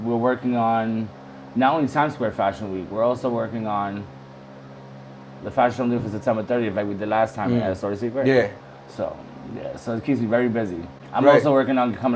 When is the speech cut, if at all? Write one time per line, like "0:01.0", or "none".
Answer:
none